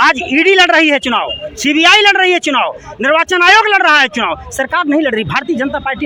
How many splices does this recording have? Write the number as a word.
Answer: zero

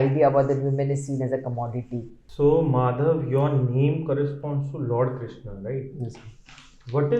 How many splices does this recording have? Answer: one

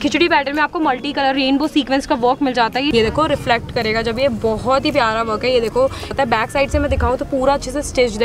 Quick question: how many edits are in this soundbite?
two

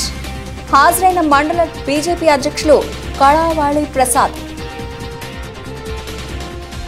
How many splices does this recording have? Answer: zero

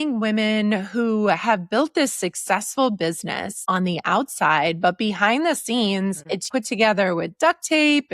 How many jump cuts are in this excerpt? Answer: two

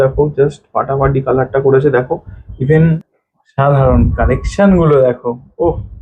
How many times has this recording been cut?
one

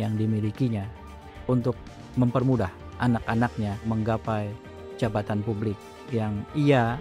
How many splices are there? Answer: one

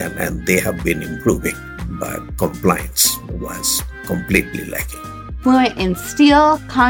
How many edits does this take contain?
zero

